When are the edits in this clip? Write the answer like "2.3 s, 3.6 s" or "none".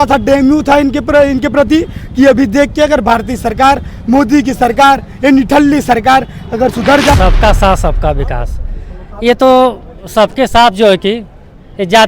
7.1 s